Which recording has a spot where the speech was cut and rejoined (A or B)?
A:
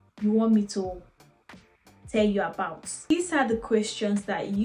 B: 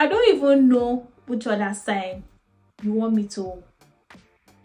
A